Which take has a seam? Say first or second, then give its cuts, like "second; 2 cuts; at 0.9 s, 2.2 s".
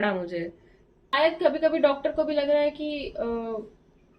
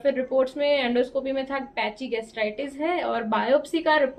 first; 1 cut; at 1.1 s